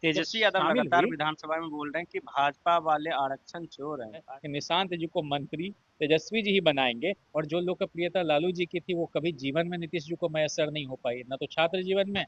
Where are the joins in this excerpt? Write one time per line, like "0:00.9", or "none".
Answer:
0:04.3
0:07.2